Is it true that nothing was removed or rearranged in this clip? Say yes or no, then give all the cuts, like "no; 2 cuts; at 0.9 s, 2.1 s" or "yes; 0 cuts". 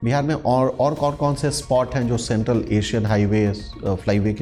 yes; 0 cuts